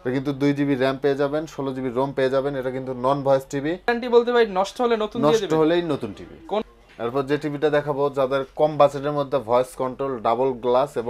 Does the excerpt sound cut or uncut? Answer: cut